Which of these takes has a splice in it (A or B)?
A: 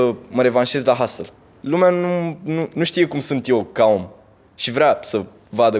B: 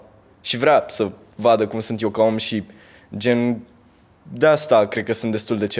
A